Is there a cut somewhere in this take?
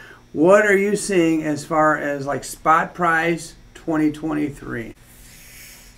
yes; 1 cut; at 5.0 s

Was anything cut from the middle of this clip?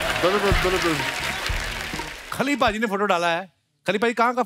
yes; 1 cut; at 2.2 s

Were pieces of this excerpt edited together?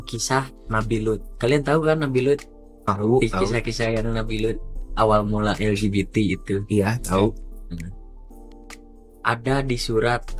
no; 0 cuts

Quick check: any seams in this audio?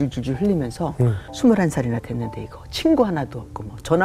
yes; 1 cut; at 1.2 s

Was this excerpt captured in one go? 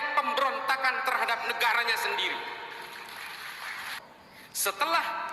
no; 1 cut; at 4.1 s

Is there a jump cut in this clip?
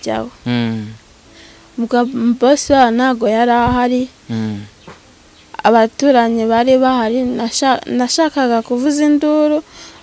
no; 0 cuts

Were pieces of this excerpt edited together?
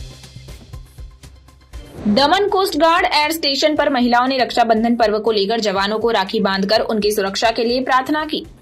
yes; 1 cut; at 1.9 s

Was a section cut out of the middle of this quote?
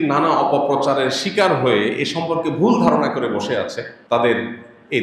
yes; 1 cut; at 3.9 s

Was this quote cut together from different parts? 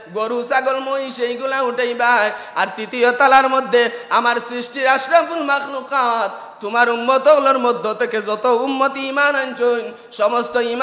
no; 0 cuts

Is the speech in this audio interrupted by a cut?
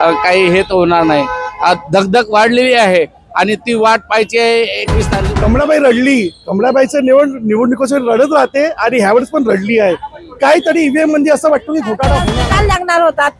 yes; 2 cuts; at 5.1 s, 12.3 s

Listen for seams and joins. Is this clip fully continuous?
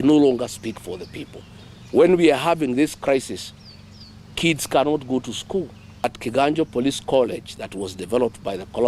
no; 1 cut; at 6.0 s

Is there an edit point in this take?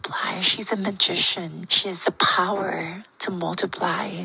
yes; 1 cut; at 1.7 s

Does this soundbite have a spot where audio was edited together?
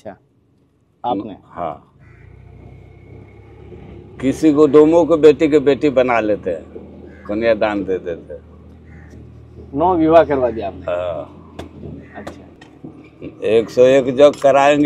yes; 1 cut; at 12.6 s

